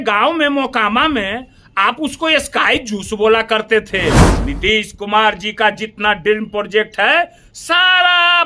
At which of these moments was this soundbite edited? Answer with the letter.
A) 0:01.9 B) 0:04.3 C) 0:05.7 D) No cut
B